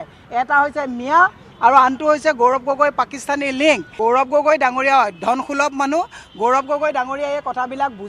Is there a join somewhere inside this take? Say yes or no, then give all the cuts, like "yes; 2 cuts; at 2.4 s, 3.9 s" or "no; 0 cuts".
yes; 1 cut; at 3.9 s